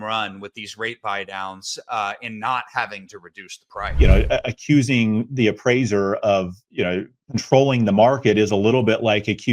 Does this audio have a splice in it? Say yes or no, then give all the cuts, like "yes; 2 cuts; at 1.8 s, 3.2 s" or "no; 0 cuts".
yes; 1 cut; at 3.9 s